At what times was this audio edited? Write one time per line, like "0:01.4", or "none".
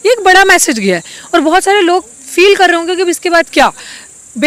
none